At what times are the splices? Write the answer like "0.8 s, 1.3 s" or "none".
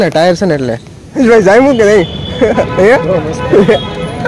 1.1 s